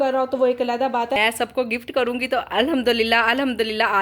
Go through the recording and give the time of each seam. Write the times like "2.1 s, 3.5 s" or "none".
1.2 s